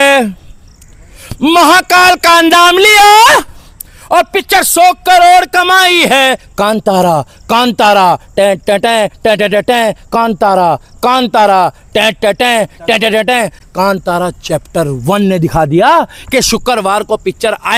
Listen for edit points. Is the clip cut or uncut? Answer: uncut